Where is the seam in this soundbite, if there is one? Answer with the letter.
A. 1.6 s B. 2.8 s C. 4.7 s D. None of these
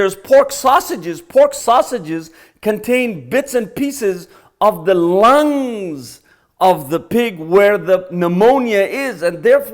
A